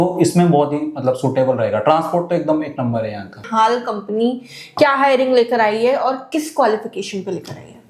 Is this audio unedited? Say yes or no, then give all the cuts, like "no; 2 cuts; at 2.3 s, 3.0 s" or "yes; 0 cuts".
yes; 0 cuts